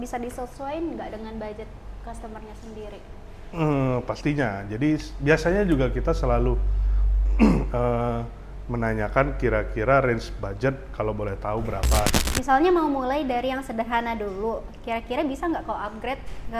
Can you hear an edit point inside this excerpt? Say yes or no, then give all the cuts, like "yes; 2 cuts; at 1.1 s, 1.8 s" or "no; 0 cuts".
yes; 1 cut; at 12.1 s